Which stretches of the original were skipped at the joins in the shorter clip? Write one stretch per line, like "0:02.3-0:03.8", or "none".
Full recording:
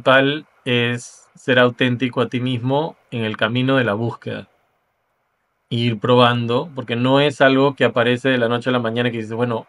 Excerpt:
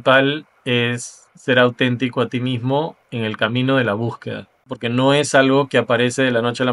0:04.7-0:06.8